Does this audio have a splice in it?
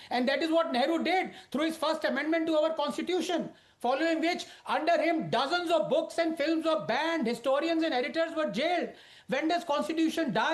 no; 0 cuts

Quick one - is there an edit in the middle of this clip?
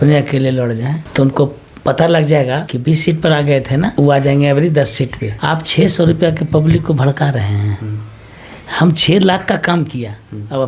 yes; 4 cuts; at 1.0 s, 2.7 s, 3.9 s, 5.3 s

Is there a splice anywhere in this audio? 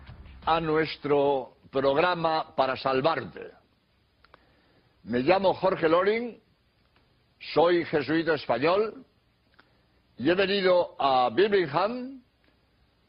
no; 0 cuts

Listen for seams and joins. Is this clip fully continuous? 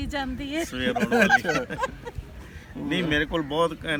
yes; 0 cuts

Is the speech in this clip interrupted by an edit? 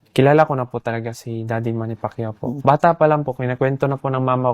yes; 1 cut; at 2.6 s

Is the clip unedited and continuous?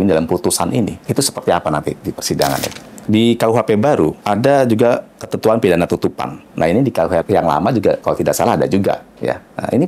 no; 1 cut; at 2.8 s

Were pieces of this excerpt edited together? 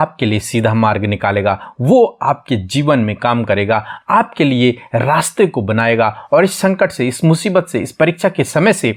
no; 0 cuts

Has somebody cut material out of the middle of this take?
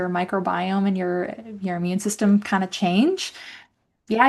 no; 0 cuts

